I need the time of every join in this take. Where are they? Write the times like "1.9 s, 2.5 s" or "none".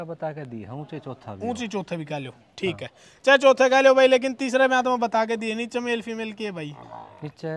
none